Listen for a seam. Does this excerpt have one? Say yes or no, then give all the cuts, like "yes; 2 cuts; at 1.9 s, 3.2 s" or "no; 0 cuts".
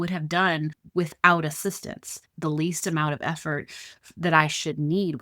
yes; 1 cut; at 2.2 s